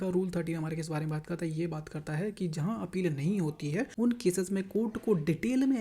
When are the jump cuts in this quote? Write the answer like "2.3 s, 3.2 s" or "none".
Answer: 3.9 s